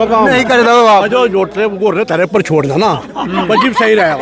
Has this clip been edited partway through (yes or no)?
no